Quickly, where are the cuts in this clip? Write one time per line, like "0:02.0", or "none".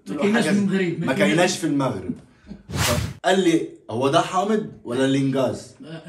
0:03.0